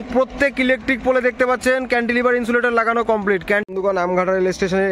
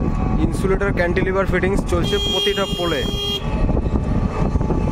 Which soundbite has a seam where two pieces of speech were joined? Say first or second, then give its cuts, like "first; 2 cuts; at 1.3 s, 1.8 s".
first; 1 cut; at 3.6 s